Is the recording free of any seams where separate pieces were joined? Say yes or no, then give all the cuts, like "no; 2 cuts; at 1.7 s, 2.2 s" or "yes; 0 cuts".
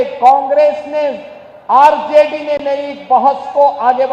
yes; 0 cuts